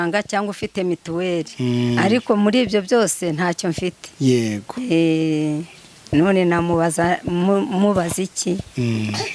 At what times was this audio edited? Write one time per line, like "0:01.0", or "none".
none